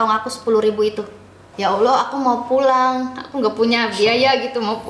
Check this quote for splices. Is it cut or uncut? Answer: cut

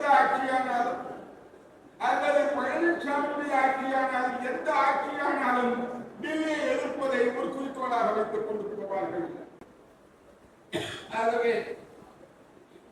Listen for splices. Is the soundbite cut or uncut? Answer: uncut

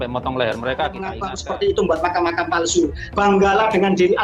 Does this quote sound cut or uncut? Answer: cut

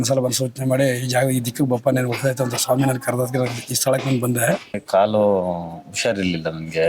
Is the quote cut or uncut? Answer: cut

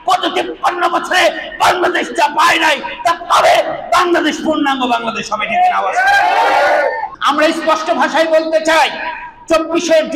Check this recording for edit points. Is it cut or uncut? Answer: cut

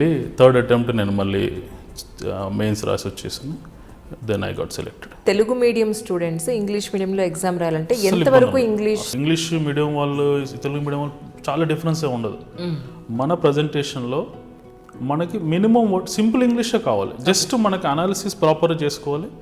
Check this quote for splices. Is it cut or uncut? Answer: cut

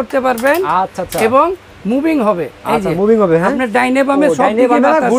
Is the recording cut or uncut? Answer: uncut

